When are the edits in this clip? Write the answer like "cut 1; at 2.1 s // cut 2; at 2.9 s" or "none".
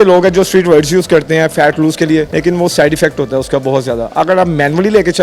cut 1; at 2.3 s